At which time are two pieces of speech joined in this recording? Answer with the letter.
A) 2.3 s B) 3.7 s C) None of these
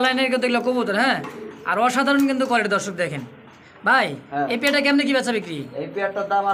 C